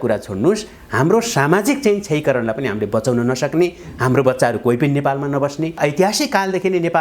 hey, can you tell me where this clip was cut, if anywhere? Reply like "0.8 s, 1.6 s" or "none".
5.8 s